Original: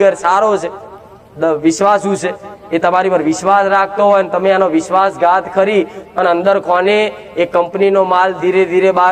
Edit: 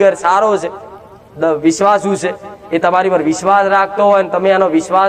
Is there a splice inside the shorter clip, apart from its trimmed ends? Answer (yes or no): no